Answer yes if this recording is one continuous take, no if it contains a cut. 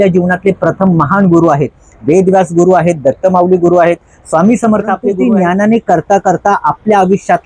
no